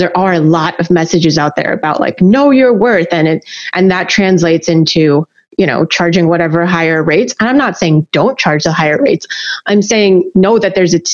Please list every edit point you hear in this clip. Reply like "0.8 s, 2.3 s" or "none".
5.4 s